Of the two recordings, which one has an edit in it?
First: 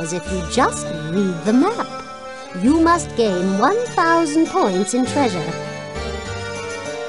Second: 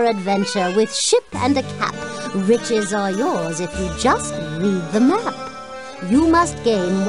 first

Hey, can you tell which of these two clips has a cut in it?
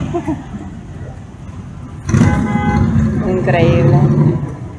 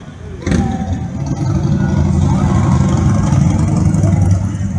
first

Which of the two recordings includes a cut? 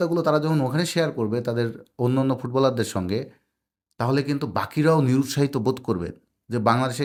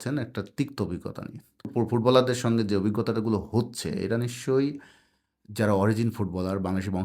second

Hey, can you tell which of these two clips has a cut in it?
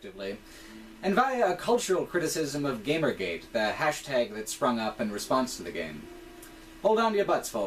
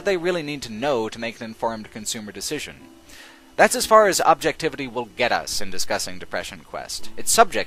first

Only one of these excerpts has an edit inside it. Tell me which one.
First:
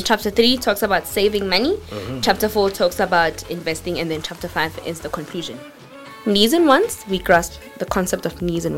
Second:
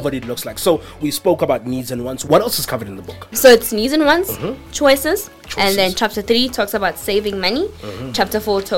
second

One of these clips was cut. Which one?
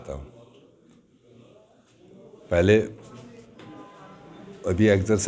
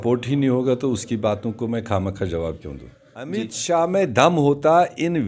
second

